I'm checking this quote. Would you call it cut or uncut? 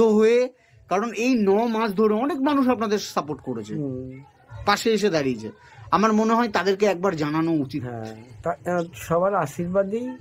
uncut